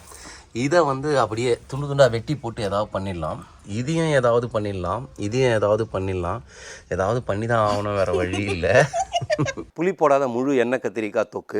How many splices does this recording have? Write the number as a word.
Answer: one